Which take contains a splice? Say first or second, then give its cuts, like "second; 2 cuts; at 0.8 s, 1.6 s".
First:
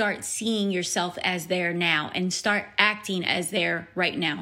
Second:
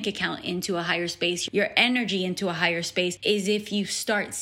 second; 2 cuts; at 1.4 s, 3.2 s